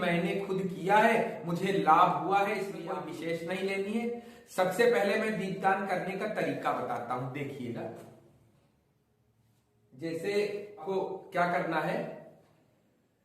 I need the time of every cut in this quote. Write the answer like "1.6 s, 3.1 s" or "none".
2.8 s